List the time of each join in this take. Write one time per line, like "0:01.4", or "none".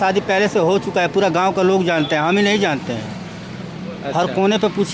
none